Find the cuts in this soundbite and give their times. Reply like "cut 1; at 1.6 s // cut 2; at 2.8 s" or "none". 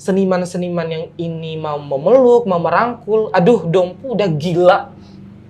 none